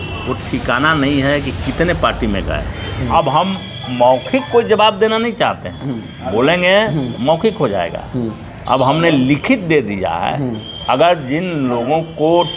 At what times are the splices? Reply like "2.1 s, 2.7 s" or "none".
3.1 s